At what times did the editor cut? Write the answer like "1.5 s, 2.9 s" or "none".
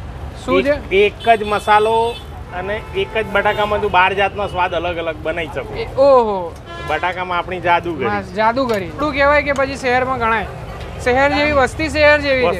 9.0 s

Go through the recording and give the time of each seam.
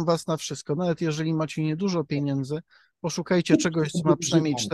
none

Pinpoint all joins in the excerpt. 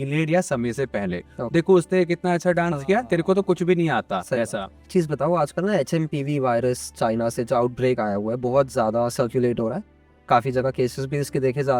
1.3 s, 4.9 s

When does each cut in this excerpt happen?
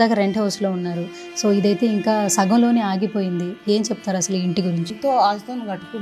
4.9 s

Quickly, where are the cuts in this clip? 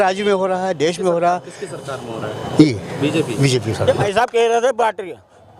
3.8 s

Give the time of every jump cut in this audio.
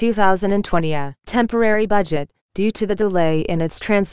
0.9 s

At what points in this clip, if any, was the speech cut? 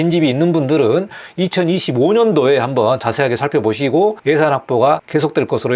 none

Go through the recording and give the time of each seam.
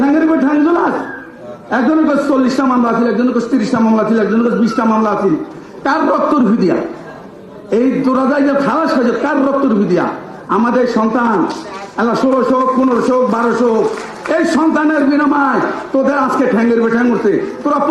none

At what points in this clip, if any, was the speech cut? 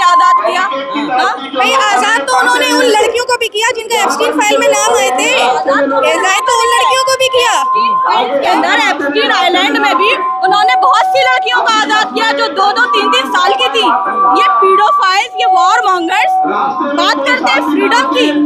none

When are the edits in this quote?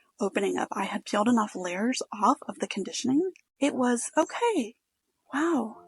3.4 s

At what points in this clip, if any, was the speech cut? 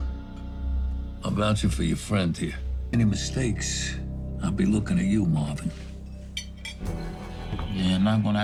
none

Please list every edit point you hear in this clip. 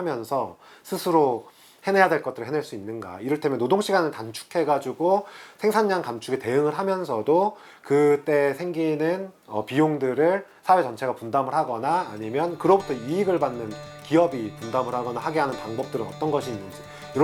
none

